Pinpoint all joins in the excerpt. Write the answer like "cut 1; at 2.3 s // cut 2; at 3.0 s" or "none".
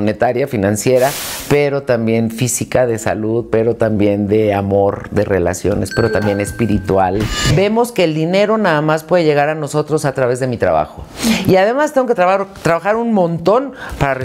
cut 1; at 7.4 s